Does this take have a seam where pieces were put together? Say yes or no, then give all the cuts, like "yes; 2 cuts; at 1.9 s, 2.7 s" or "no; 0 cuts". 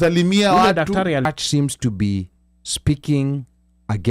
yes; 1 cut; at 1.2 s